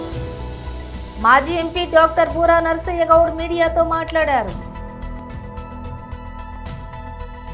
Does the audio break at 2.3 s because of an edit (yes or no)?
no